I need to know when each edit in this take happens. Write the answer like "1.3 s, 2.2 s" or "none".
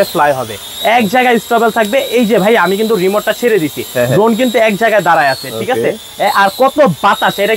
none